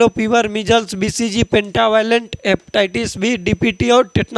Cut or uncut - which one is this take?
uncut